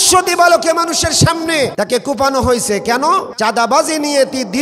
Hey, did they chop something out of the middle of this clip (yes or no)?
yes